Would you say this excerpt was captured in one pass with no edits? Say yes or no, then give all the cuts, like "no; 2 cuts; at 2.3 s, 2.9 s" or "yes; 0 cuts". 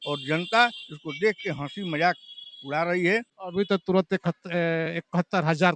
no; 1 cut; at 3.4 s